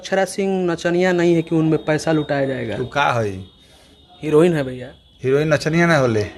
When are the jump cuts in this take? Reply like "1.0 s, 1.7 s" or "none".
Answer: none